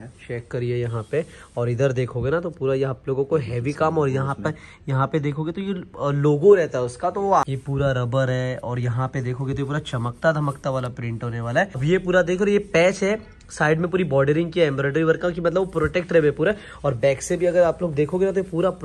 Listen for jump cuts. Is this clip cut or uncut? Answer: cut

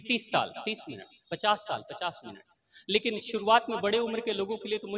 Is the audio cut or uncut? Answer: uncut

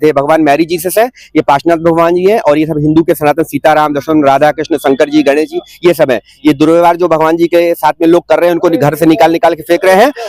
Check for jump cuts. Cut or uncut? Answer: uncut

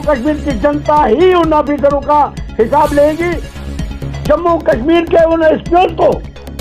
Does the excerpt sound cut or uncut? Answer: cut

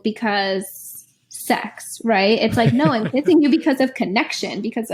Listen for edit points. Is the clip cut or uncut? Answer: uncut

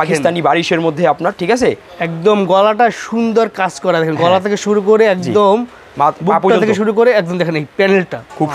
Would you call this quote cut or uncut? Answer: uncut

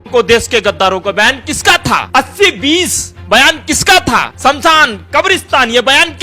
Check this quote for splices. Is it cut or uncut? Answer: cut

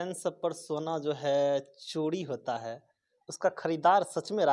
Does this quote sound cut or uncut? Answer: uncut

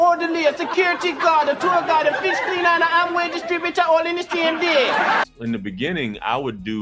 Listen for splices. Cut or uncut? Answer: cut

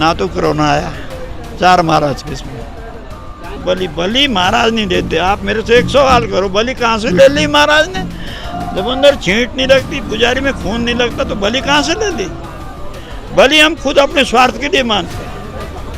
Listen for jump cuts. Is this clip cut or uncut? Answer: cut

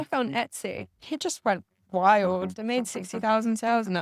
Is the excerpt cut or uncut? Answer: cut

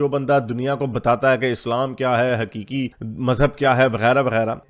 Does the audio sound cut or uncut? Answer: uncut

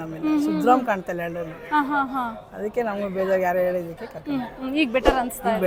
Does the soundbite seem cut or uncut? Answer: uncut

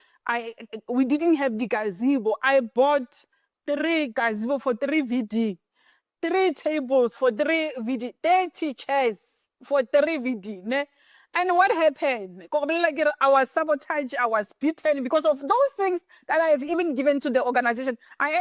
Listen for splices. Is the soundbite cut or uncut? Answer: uncut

